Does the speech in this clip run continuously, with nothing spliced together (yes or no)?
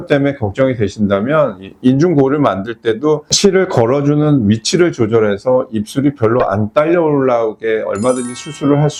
yes